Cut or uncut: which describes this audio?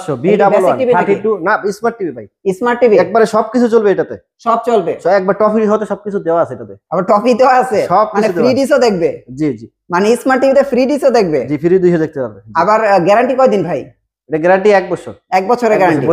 uncut